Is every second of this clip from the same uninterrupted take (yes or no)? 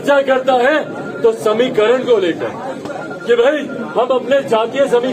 yes